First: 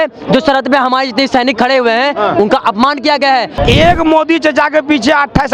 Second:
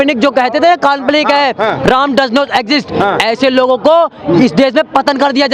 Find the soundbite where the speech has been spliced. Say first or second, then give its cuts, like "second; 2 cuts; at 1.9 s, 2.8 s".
first; 1 cut; at 3.5 s